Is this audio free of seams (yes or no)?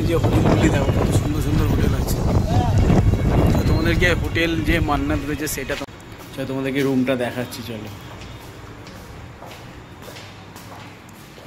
no